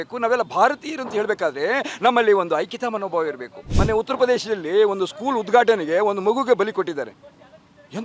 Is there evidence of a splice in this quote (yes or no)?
yes